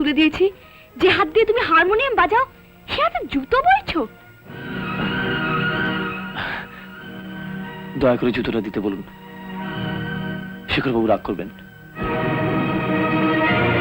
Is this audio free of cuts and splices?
yes; 0 cuts

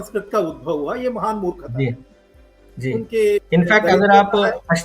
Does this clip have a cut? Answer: no; 0 cuts

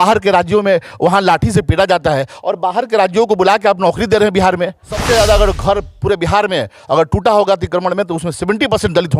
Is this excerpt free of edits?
no; 1 cut; at 4.9 s

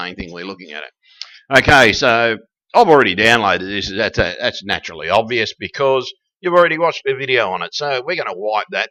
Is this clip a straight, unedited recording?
yes; 0 cuts

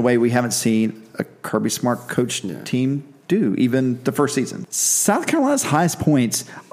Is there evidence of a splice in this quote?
yes; 1 cut; at 4.6 s

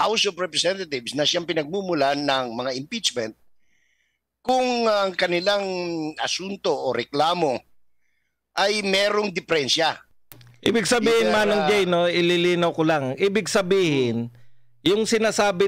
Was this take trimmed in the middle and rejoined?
no; 0 cuts

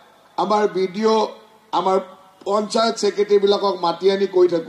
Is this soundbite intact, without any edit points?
yes; 0 cuts

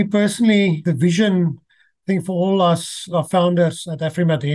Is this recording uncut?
no; 2 cuts; at 0.8 s, 3.1 s

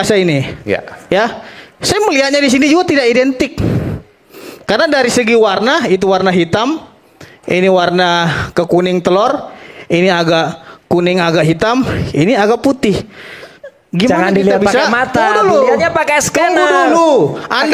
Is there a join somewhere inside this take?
no; 0 cuts

